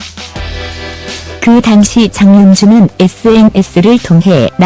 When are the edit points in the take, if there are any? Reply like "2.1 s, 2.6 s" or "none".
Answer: 1.2 s

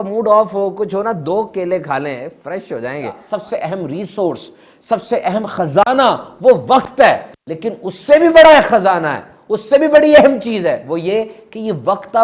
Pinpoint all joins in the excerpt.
3.2 s

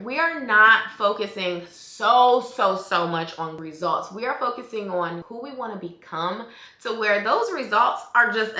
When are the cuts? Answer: 3.6 s, 5.3 s

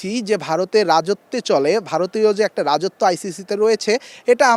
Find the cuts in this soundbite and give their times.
none

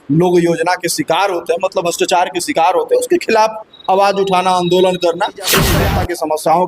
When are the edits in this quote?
5.8 s

